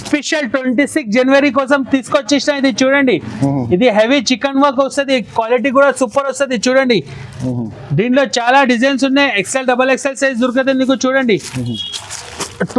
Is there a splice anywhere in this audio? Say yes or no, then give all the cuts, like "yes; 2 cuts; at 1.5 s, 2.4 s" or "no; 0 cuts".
no; 0 cuts